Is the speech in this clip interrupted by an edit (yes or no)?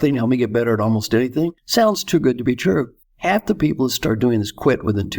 yes